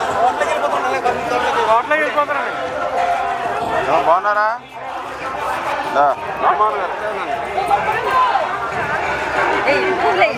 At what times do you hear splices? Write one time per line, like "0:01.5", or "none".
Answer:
none